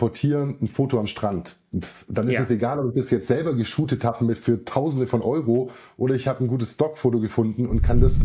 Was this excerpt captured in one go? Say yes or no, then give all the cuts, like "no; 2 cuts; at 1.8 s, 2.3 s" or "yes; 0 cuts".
yes; 0 cuts